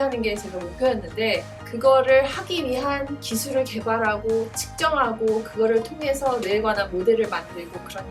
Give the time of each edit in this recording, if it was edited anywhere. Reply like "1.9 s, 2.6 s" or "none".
1.6 s